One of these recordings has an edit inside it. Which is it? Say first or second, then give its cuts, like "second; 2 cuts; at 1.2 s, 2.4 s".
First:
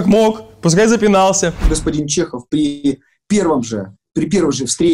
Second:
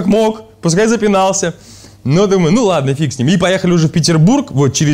first; 1 cut; at 1.7 s